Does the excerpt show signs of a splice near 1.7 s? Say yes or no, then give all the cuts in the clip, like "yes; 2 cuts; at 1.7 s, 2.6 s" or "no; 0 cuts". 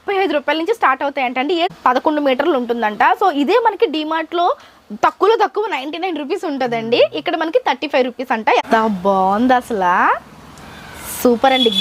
yes; 2 cuts; at 1.7 s, 8.6 s